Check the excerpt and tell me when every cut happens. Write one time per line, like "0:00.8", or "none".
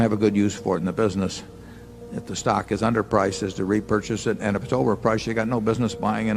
none